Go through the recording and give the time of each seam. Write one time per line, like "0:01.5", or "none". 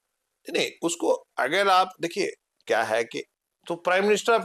0:03.3